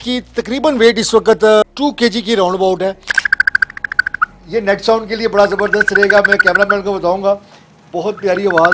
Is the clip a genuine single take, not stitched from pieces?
no; 2 cuts; at 1.6 s, 3.2 s

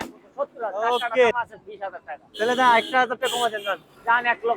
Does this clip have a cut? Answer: yes; 1 cut; at 1.4 s

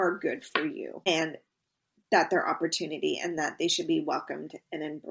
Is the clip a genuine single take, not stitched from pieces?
no; 1 cut; at 1.1 s

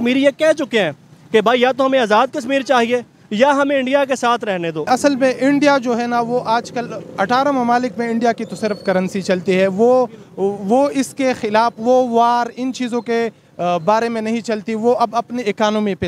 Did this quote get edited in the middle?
yes; 1 cut; at 4.8 s

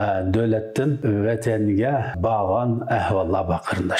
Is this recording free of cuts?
no; 2 cuts; at 1.0 s, 2.2 s

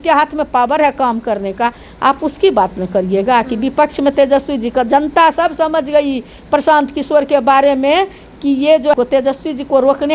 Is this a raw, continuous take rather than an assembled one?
no; 1 cut; at 8.9 s

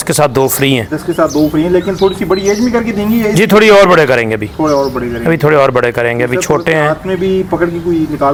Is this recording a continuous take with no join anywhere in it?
yes; 0 cuts

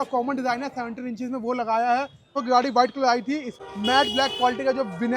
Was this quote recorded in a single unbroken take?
no; 2 cuts; at 2.4 s, 3.5 s

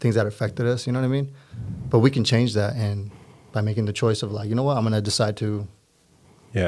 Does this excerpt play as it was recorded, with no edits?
yes; 0 cuts

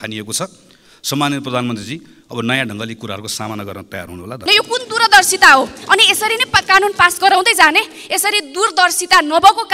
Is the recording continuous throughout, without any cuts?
no; 1 cut; at 4.5 s

